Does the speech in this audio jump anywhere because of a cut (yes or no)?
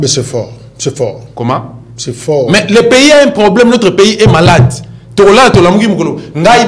no